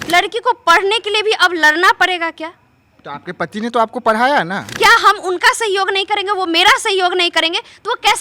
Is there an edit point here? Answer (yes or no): yes